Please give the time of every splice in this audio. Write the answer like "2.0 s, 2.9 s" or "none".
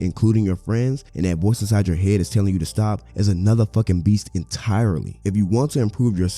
1.0 s, 3.1 s, 5.1 s